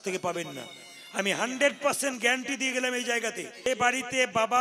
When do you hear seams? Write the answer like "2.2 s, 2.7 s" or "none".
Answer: 3.7 s